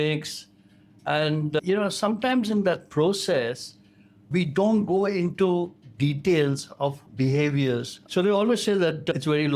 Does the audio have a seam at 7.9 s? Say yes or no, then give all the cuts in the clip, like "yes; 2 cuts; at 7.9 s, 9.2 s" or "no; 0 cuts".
yes; 1 cut; at 7.9 s